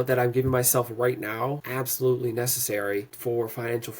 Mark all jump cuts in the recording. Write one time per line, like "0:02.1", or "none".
0:01.6
0:03.1